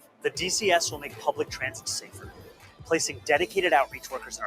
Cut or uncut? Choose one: uncut